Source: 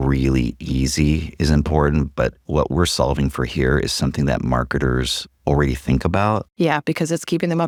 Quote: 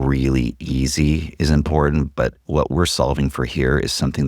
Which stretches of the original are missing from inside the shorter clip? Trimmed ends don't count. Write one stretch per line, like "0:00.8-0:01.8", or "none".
none